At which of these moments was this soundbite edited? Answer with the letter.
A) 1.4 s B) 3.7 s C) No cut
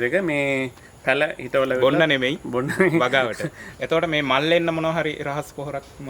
B